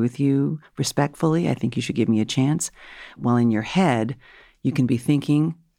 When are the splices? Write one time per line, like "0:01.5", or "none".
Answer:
0:03.2

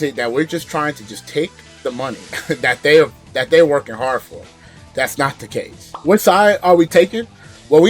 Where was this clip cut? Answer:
0:05.9

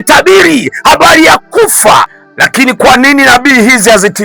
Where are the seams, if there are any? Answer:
0:02.2

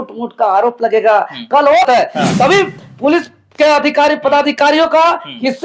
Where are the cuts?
0:01.8

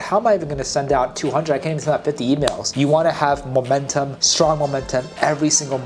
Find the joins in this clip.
0:02.7

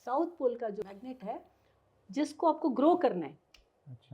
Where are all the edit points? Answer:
0:00.9

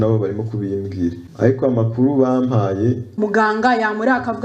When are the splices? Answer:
0:01.2
0:03.1

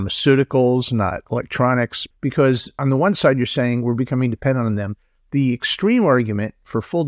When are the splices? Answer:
0:02.3

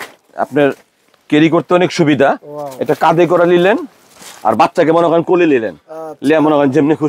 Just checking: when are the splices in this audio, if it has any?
none

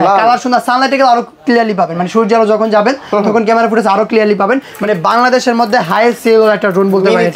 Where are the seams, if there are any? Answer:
0:04.7

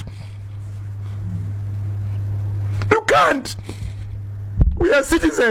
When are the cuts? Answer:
none

